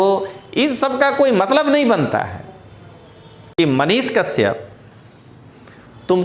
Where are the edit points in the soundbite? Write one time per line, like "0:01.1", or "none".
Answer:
0:03.6